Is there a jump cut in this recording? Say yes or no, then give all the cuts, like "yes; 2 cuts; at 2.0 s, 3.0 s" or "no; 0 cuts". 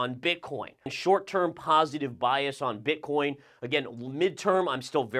yes; 1 cut; at 0.9 s